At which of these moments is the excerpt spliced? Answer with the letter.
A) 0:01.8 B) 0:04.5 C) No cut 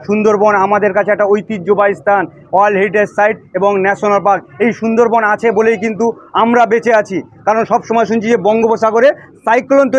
C